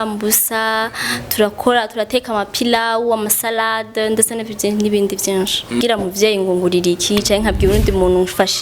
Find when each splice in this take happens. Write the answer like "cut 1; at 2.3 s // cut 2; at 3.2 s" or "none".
cut 1; at 5.8 s